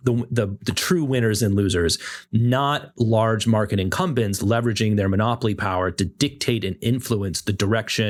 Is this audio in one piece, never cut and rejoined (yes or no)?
yes